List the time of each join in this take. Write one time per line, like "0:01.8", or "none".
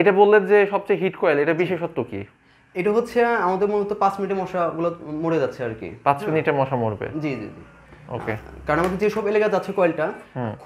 none